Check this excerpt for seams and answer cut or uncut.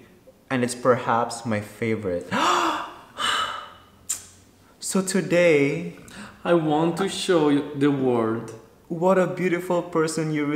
uncut